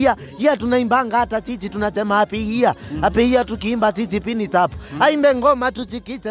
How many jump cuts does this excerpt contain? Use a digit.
0